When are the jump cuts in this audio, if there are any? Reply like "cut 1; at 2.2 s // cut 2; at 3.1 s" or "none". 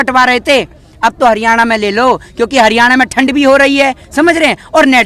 none

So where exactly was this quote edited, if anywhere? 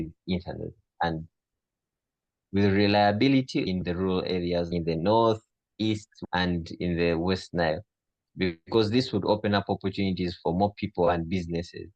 none

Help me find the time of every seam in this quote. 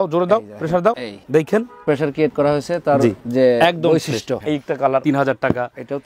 cut 1; at 1.9 s // cut 2; at 4.4 s

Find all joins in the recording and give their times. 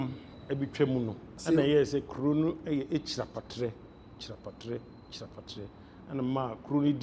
cut 1; at 1.3 s

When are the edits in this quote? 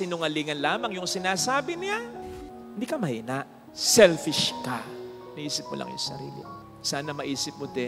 cut 1; at 2.2 s

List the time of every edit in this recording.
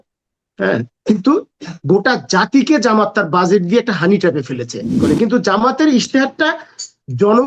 cut 1; at 4.9 s

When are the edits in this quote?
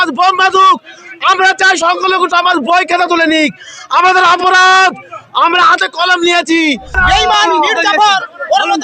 cut 1; at 7.0 s

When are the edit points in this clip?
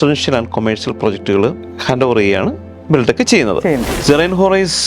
cut 1; at 1.7 s // cut 2; at 3.9 s

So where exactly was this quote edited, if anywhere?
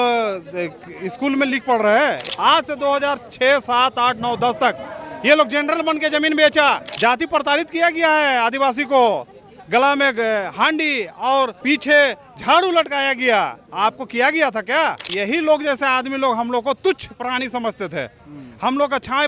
cut 1; at 2.3 s // cut 2; at 6.9 s // cut 3; at 11.6 s // cut 4; at 15.1 s

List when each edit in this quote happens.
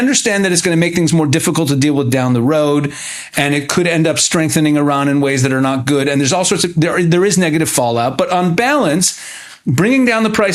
none

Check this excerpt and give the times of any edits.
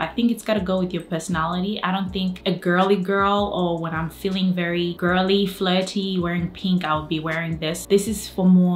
cut 1; at 2.4 s // cut 2; at 5.0 s // cut 3; at 7.8 s

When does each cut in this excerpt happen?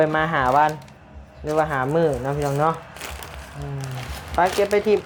none

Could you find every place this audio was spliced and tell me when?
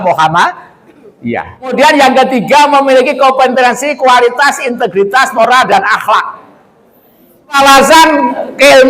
cut 1; at 1.7 s // cut 2; at 7.6 s

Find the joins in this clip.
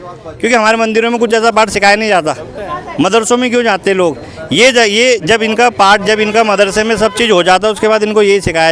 none

